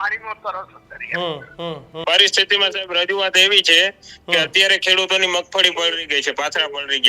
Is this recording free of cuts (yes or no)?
no